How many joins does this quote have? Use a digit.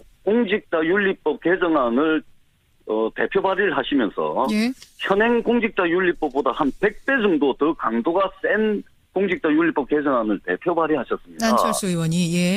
0